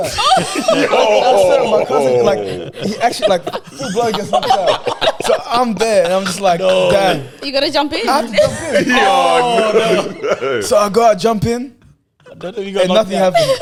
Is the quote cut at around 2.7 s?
no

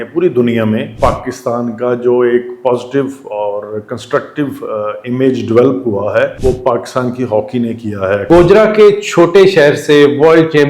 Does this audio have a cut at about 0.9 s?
yes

